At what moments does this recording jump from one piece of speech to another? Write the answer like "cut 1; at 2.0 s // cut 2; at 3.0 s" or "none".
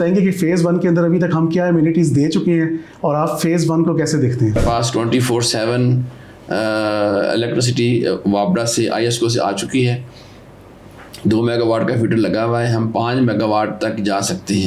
cut 1; at 4.5 s